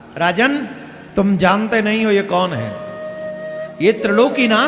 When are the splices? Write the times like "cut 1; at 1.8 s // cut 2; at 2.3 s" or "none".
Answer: none